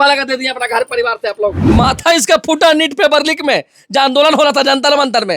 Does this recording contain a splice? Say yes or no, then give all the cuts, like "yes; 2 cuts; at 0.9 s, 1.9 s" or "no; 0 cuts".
yes; 1 cut; at 1.7 s